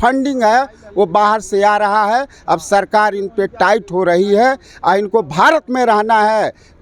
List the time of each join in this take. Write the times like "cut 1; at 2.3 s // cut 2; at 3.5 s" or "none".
none

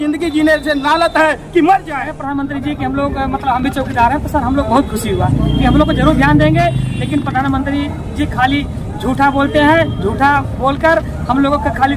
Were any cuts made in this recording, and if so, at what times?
cut 1; at 2.2 s

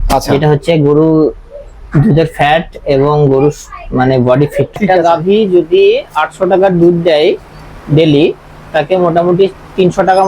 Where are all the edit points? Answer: cut 1; at 4.8 s

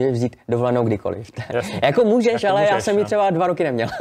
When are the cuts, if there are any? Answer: none

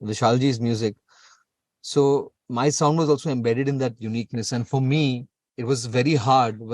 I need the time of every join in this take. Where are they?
cut 1; at 2.4 s

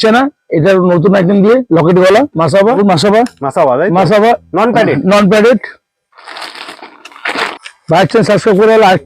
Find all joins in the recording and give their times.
cut 1; at 2.8 s // cut 2; at 7.5 s

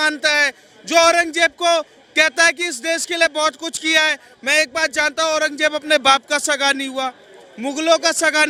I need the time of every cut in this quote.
none

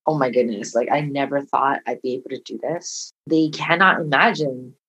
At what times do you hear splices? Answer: cut 1; at 3.2 s

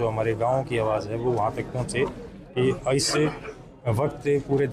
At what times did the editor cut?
none

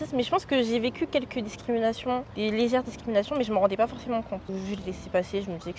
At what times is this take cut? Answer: cut 1; at 2.3 s // cut 2; at 4.7 s

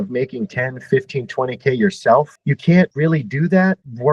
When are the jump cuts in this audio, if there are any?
none

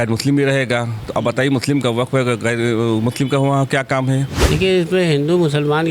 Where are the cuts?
cut 1; at 4.4 s

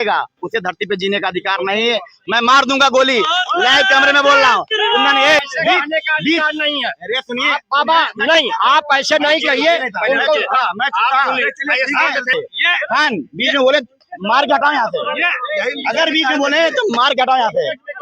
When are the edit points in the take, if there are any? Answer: cut 1; at 5.4 s // cut 2; at 12.3 s

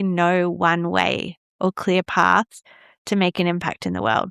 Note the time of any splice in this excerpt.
none

